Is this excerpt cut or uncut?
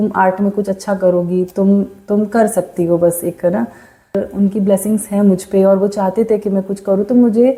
uncut